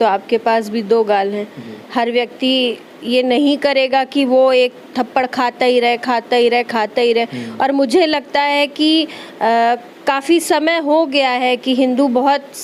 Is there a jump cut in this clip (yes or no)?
no